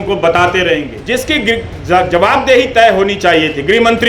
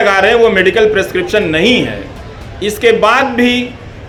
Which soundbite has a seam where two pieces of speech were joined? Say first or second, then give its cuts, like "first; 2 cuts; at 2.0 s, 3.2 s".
first; 1 cut; at 0.9 s